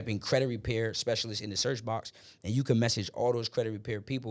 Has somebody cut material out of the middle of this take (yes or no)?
no